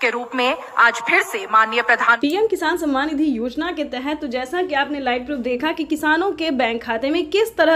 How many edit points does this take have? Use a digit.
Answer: 1